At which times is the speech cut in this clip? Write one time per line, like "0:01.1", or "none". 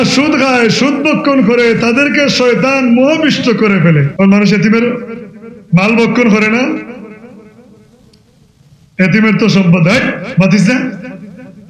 0:04.1